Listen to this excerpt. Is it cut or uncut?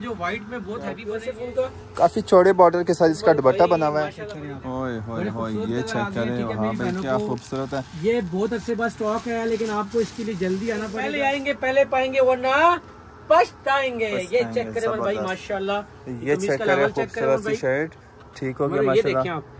cut